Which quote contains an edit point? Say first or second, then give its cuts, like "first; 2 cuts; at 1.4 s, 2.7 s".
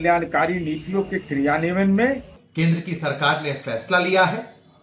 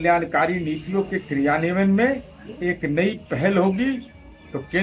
first; 1 cut; at 2.4 s